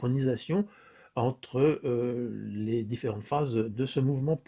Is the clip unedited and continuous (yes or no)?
yes